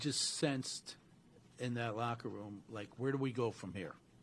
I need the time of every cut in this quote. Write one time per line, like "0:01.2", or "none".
none